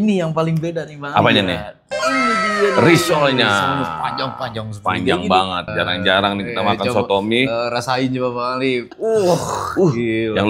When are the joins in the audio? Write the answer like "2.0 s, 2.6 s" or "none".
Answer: none